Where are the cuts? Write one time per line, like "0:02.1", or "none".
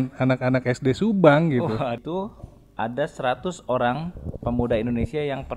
0:02.0